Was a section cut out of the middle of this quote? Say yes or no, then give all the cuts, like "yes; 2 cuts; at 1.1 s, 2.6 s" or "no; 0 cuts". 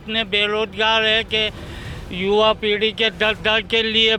no; 0 cuts